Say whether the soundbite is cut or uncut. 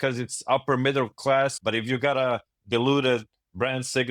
cut